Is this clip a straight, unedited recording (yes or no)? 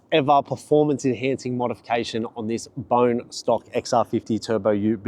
yes